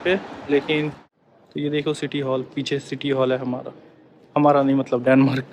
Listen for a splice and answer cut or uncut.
cut